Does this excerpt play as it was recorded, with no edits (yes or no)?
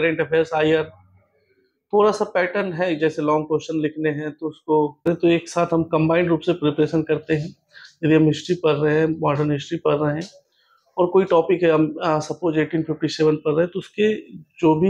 no